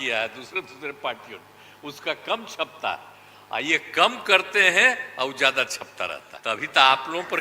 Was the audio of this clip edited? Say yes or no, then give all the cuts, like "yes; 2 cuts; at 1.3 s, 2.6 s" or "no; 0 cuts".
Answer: yes; 1 cut; at 6.3 s